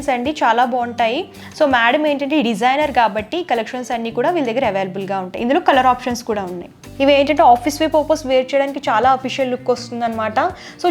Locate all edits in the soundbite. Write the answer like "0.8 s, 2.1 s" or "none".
6.8 s